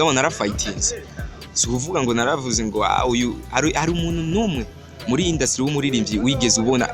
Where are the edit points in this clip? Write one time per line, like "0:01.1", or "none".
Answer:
none